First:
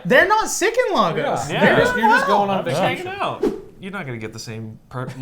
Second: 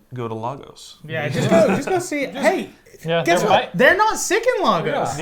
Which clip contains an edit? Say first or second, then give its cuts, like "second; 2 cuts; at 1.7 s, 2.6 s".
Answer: first; 1 cut; at 3.4 s